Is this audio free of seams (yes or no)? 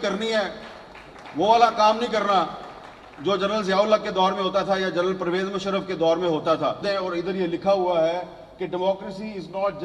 no